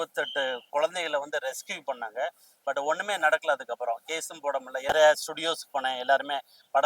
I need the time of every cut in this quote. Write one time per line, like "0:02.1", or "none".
0:04.9